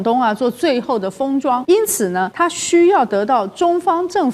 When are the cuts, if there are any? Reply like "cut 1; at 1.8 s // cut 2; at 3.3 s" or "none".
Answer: cut 1; at 2.0 s